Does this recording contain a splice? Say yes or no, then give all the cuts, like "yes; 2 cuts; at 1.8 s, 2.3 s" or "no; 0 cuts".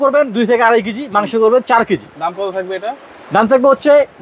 no; 0 cuts